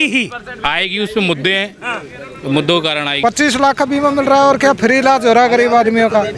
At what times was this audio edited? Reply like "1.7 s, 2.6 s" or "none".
3.2 s